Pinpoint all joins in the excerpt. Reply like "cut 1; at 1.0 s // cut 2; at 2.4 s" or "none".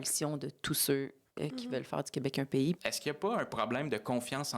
cut 1; at 2.8 s